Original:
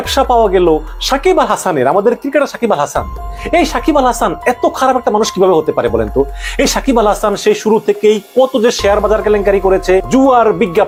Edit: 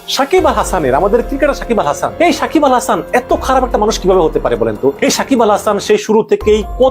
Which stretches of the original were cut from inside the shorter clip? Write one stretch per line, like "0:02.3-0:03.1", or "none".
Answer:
0:03.0-0:03.4
0:06.3-0:06.5

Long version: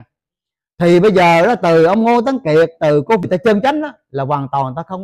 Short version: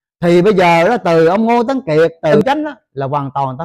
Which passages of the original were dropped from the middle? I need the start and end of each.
0:03.0-0:03.6

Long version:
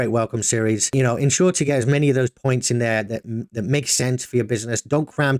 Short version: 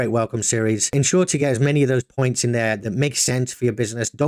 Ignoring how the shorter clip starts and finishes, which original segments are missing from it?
0:00.9-0:01.2
0:03.1-0:03.6

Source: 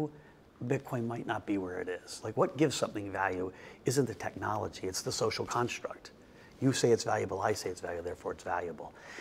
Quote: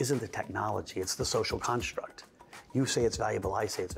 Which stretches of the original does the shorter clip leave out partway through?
none

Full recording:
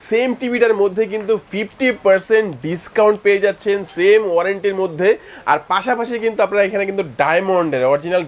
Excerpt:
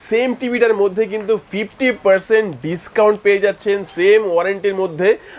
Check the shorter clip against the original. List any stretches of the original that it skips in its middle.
none

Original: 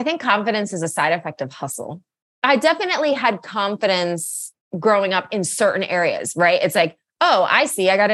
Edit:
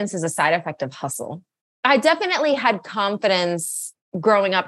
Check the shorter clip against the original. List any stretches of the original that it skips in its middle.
none

